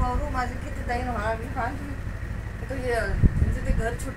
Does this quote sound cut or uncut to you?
uncut